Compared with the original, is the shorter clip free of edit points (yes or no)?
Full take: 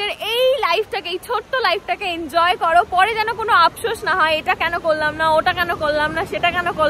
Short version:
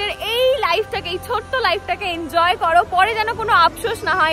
yes